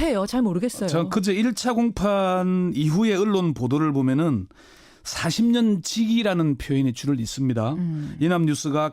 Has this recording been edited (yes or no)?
yes